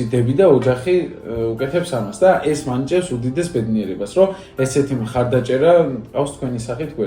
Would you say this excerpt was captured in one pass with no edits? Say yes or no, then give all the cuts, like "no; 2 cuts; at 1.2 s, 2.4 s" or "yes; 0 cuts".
yes; 0 cuts